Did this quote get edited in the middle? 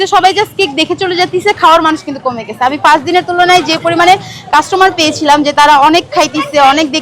no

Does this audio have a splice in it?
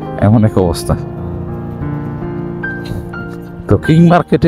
no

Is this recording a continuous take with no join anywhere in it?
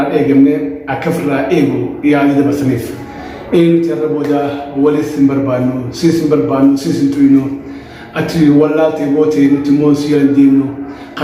yes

